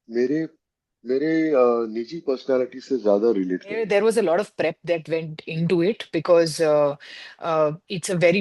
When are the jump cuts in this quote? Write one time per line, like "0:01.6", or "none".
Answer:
0:03.8